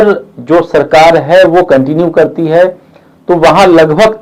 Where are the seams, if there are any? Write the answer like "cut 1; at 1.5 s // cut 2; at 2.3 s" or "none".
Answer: none